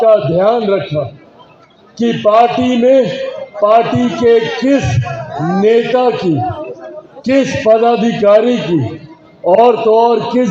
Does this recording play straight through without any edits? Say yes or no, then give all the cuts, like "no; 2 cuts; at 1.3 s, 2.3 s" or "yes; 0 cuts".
yes; 0 cuts